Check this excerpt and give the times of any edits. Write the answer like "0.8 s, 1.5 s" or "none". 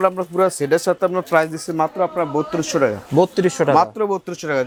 none